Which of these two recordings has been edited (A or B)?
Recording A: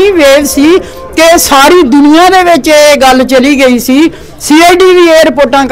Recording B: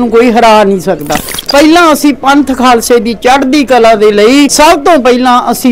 B